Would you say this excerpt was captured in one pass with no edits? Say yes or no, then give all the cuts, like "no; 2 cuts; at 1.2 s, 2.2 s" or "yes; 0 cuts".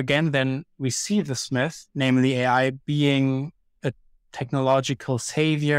no; 1 cut; at 1.8 s